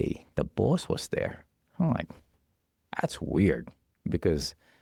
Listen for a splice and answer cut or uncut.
uncut